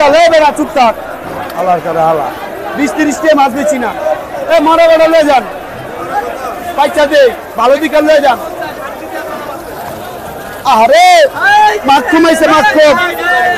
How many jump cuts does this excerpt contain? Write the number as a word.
zero